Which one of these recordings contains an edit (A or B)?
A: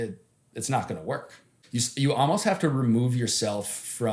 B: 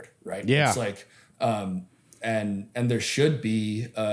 A